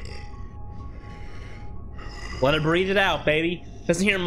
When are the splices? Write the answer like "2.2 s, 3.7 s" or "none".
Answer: none